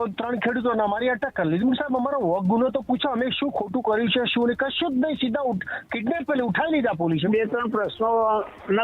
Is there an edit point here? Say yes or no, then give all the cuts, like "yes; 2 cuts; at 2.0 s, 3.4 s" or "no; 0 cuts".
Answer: yes; 1 cut; at 7.3 s